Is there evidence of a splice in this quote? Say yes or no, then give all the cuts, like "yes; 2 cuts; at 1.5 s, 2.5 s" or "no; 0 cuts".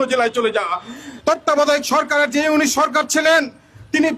yes; 1 cut; at 1.1 s